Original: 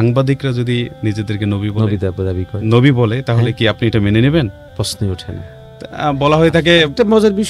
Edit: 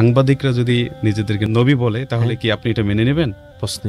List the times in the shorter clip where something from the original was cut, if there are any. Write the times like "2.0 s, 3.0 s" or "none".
1.4 s